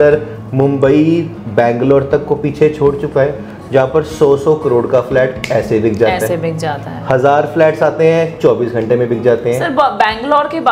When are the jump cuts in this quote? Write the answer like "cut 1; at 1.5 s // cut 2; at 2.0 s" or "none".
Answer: none